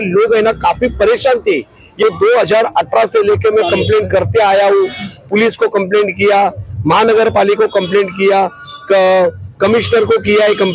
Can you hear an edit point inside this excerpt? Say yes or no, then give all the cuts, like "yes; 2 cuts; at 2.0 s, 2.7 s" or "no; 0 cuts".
yes; 1 cut; at 1.8 s